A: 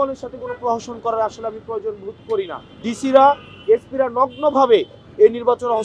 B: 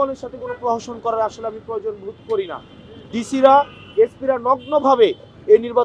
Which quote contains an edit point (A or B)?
A